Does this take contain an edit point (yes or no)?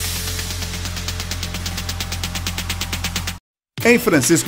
yes